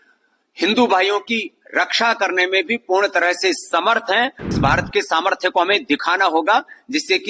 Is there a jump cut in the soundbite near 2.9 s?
no; 1 cut; at 4.5 s

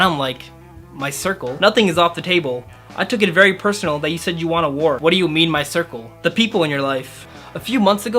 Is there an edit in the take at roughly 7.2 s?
yes; 2 cuts; at 5.0 s, 7.2 s

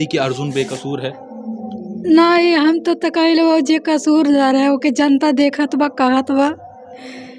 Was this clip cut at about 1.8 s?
no; 0 cuts

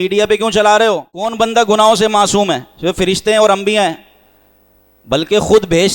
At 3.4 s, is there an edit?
no; 1 cut; at 1.3 s

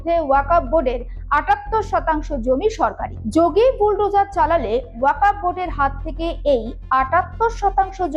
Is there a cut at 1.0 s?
no; 1 cut; at 3.1 s

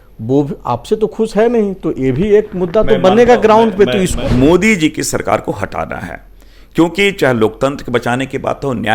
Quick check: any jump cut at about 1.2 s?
no; 1 cut; at 4.2 s

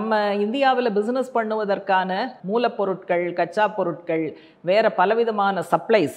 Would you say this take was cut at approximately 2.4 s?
yes; 1 cut; at 2.4 s

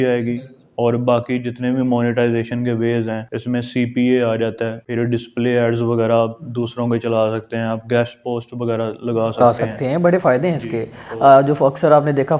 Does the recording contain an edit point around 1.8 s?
no; 2 cuts; at 3.3 s, 4.8 s

